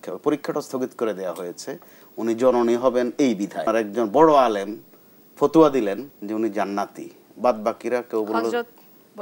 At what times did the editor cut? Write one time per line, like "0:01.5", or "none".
0:03.6
0:06.1